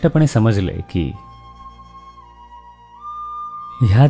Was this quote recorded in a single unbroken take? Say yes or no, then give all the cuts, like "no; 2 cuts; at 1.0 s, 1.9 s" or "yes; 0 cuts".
yes; 0 cuts